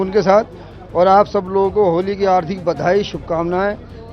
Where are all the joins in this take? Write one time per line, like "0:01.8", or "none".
none